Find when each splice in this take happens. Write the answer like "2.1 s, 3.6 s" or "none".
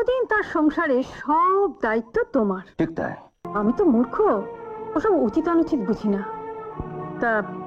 3.4 s